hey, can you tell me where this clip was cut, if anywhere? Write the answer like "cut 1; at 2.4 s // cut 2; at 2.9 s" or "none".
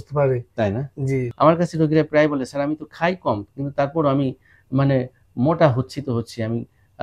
cut 1; at 1.3 s

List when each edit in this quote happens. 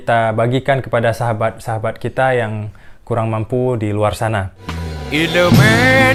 none

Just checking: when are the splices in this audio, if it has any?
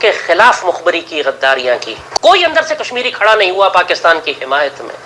cut 1; at 2.1 s

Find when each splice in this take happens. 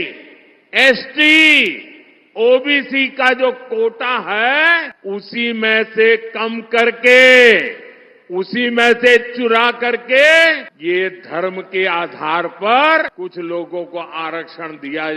cut 1; at 4.9 s // cut 2; at 10.7 s // cut 3; at 13.1 s

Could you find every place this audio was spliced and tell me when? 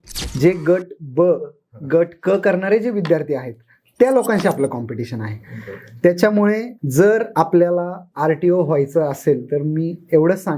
cut 1; at 6.8 s // cut 2; at 7.6 s

